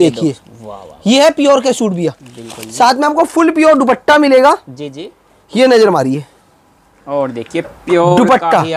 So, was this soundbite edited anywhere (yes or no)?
no